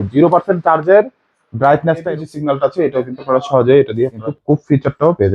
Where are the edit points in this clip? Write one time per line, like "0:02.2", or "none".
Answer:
0:02.0
0:04.3